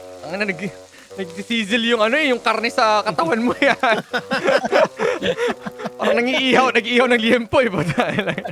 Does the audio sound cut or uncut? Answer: uncut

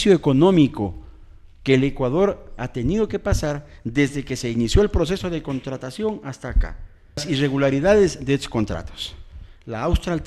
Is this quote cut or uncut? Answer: cut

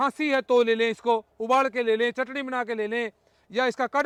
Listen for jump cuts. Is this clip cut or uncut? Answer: uncut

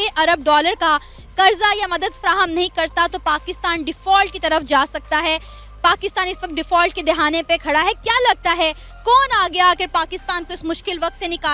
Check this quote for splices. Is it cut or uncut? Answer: uncut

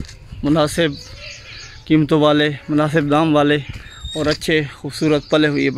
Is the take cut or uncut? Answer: uncut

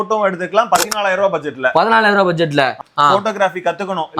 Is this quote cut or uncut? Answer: cut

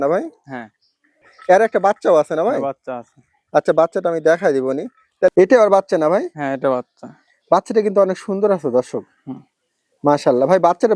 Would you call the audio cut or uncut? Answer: cut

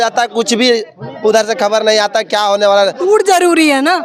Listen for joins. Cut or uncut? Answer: uncut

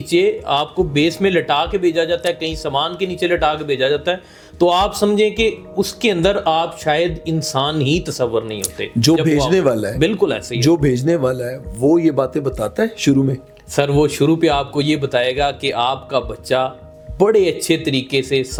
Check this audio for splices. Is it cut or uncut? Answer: uncut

